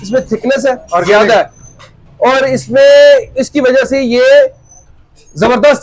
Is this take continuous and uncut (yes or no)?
yes